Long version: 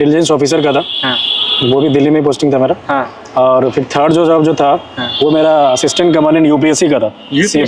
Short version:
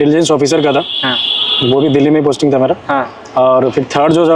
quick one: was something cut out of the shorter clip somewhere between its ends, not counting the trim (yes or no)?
no